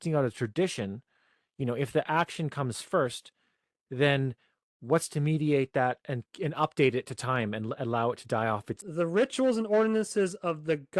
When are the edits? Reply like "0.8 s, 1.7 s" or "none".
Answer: 8.8 s